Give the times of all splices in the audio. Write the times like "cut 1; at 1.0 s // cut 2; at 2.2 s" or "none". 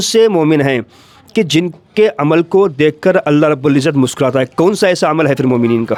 none